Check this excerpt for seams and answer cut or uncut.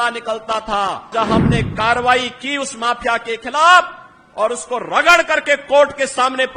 cut